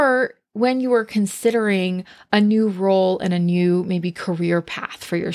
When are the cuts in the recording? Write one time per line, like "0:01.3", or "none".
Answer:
none